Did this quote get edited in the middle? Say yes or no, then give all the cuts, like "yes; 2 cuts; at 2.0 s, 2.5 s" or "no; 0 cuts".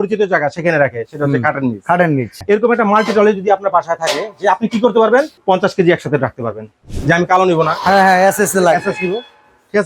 yes; 3 cuts; at 2.4 s, 5.4 s, 6.9 s